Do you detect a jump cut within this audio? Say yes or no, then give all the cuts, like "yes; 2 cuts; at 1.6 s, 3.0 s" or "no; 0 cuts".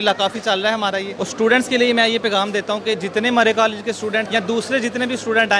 yes; 2 cuts; at 1.2 s, 4.3 s